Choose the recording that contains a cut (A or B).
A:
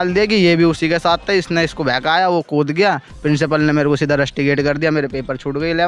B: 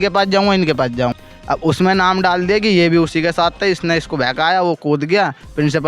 B